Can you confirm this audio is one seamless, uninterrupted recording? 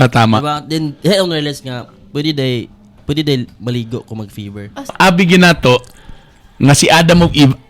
no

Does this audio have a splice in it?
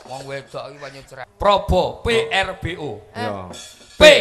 yes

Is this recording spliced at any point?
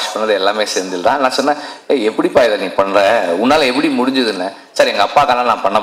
no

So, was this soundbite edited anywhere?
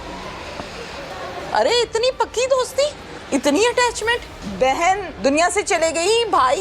yes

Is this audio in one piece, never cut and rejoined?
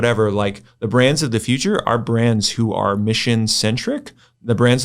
yes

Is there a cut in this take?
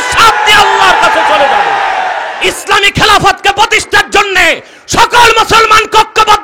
yes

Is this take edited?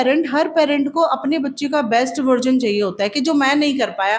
no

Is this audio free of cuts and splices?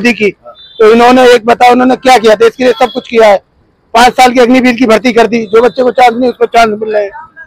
yes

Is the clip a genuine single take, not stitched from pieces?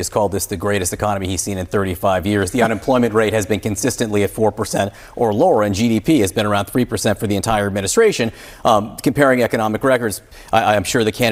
yes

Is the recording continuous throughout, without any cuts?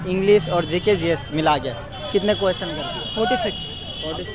yes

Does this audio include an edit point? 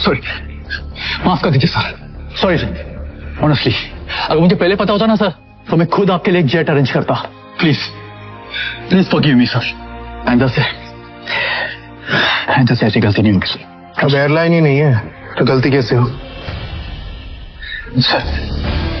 no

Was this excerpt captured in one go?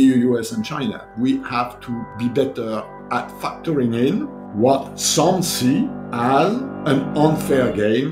no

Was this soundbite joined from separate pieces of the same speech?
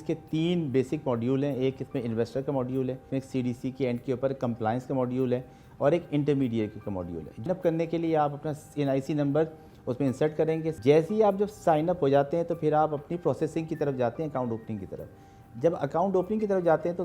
yes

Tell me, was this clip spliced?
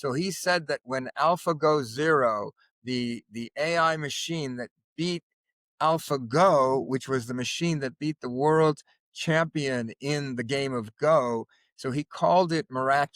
no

